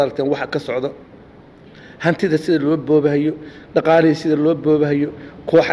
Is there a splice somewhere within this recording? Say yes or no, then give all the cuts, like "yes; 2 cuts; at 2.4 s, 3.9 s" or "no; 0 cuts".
no; 0 cuts